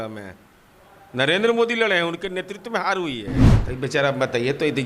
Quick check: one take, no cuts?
no; 1 cut; at 3.5 s

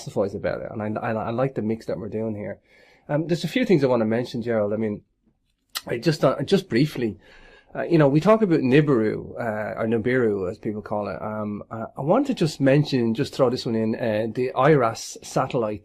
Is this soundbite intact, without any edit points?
no; 1 cut; at 7.2 s

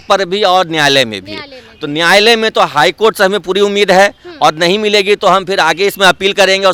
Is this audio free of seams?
yes; 0 cuts

